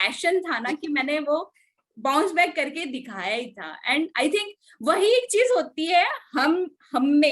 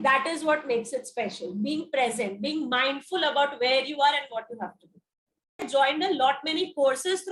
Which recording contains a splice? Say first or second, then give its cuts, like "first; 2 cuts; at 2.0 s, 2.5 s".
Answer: second; 1 cut; at 5.6 s